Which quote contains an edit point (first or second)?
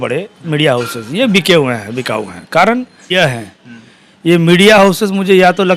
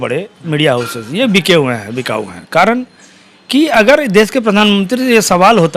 first